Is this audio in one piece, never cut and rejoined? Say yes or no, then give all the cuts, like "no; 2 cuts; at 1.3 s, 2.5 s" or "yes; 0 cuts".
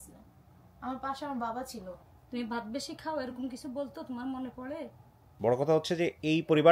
no; 2 cuts; at 1.9 s, 5.2 s